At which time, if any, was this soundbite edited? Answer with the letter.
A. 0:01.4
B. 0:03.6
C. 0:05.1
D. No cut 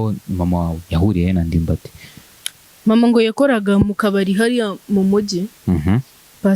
D